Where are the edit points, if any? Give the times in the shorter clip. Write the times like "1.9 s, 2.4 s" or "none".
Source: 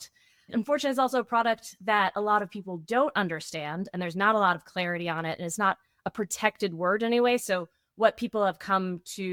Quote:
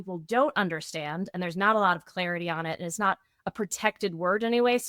none